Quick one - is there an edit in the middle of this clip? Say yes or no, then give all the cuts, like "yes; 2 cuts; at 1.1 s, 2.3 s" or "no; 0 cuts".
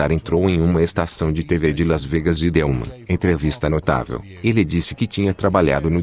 yes; 1 cut; at 2.9 s